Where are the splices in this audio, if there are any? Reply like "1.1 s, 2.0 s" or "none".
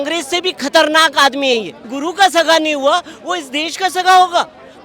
1.8 s